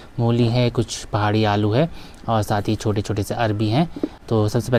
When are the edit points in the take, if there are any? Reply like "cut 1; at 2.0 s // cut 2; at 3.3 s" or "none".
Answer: none

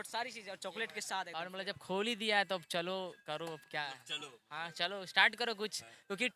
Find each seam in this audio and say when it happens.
cut 1; at 1.5 s

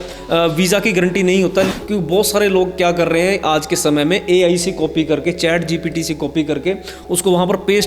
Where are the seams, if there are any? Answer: cut 1; at 1.7 s

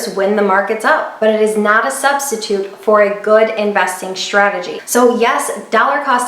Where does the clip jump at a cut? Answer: cut 1; at 1.1 s // cut 2; at 4.8 s

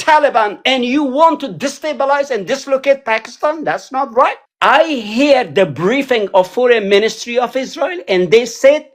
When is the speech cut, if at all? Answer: cut 1; at 4.5 s

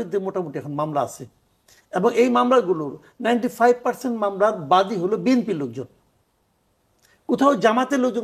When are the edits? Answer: none

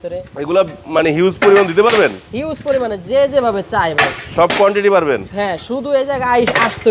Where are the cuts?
none

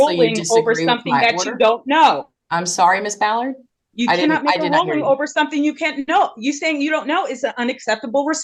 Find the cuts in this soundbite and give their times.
none

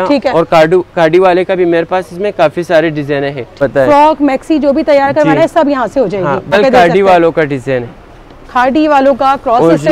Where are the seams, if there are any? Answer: cut 1; at 3.5 s // cut 2; at 6.5 s

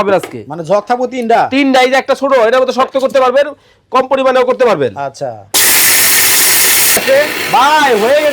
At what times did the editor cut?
cut 1; at 7.0 s

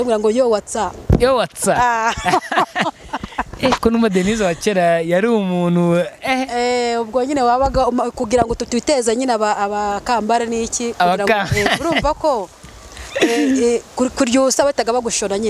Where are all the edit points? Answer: none

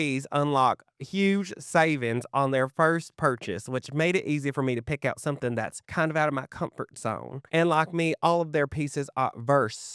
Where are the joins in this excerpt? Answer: cut 1; at 5.8 s // cut 2; at 7.3 s

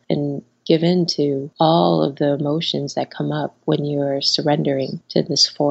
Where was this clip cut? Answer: none

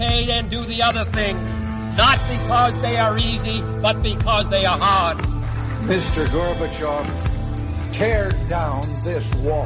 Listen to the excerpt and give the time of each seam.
none

